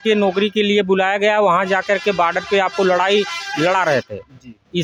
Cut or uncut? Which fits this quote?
uncut